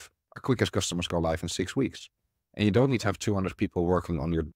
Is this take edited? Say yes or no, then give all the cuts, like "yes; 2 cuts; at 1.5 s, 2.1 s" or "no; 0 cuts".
no; 0 cuts